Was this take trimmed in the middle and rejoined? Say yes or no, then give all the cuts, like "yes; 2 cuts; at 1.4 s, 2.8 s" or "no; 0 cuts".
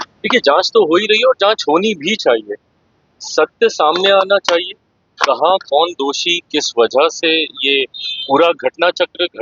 no; 0 cuts